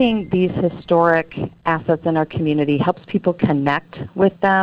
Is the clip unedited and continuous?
yes; 0 cuts

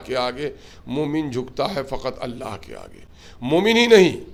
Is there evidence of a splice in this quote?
no; 0 cuts

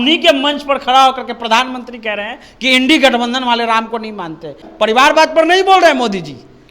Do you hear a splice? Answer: yes; 1 cut; at 4.6 s

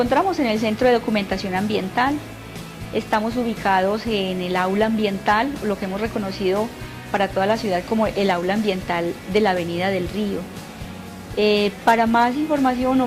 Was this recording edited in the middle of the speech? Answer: no; 0 cuts

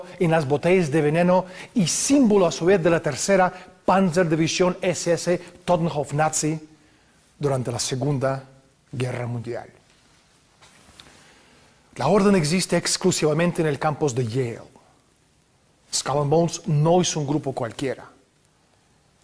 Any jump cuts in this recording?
yes; 1 cut; at 6.7 s

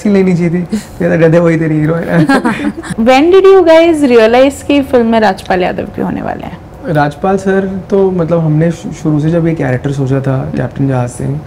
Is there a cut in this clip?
no; 0 cuts

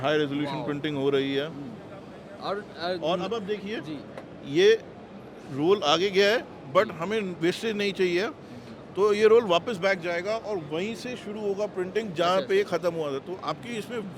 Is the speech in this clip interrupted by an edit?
no; 0 cuts

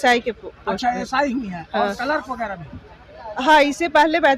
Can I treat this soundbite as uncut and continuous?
yes; 0 cuts

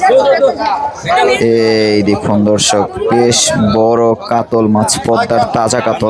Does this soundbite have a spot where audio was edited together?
no; 0 cuts

